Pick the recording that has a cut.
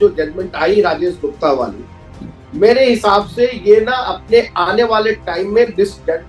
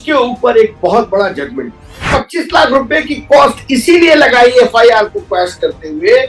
second; 1 cut; at 2.0 s

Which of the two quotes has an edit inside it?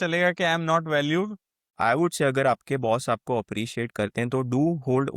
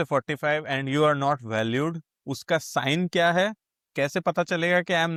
first; 1 cut; at 1.6 s

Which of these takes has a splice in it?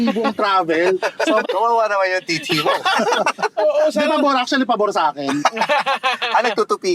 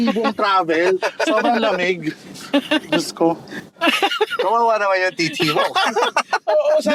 first; 1 cut; at 1.4 s

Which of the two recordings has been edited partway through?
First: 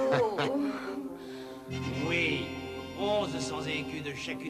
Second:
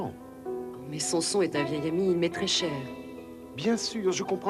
second; 1 cut; at 3.5 s

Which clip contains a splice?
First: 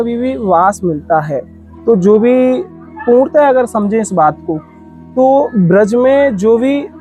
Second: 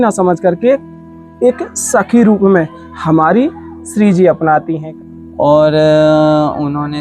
second; 1 cut; at 4.8 s

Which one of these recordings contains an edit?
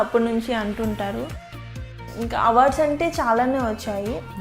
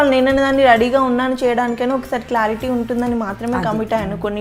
first; 1 cut; at 1.9 s

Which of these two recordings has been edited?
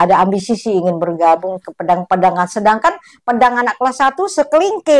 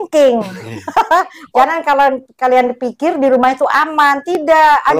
second; 1 cut; at 1.4 s

